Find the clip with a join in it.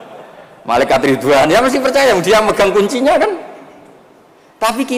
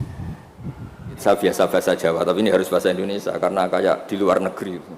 second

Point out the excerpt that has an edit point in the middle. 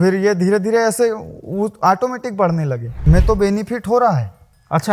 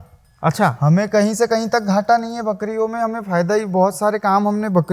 first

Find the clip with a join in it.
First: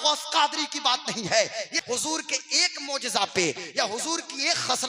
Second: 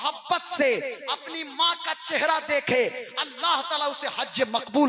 first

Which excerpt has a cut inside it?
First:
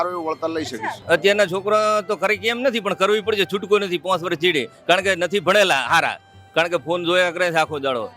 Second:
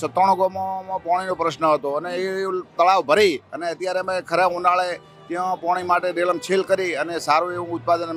first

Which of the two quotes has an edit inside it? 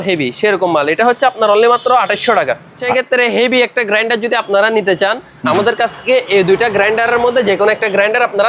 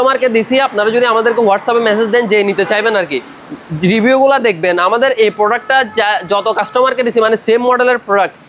first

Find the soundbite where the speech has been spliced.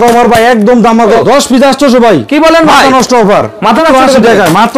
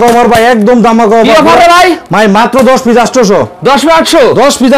first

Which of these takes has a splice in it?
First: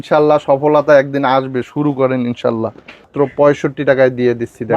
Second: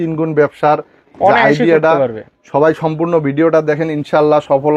first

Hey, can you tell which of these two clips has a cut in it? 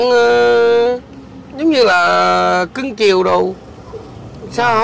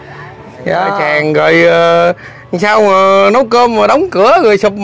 second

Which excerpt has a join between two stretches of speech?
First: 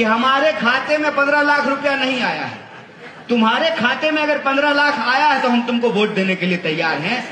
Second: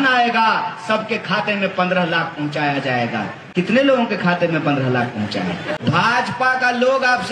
second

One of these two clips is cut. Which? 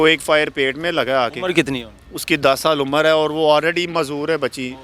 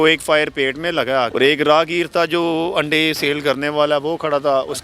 second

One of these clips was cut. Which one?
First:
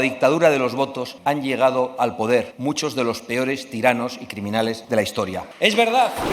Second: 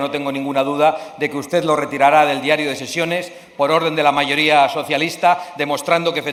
first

